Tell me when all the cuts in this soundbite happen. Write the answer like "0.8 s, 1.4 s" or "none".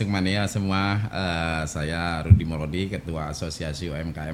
none